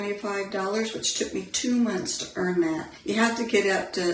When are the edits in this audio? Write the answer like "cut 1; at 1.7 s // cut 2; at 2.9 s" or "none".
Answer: cut 1; at 2.9 s